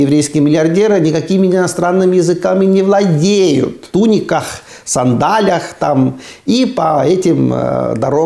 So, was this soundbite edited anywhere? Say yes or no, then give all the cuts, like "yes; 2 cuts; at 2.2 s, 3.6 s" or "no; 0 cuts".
yes; 1 cut; at 3.9 s